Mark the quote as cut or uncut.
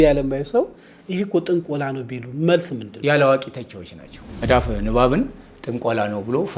cut